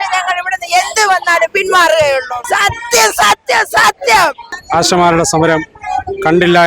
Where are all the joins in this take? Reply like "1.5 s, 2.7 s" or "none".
2.4 s, 4.5 s